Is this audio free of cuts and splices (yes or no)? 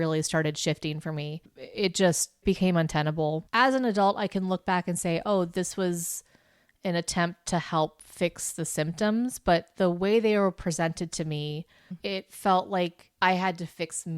no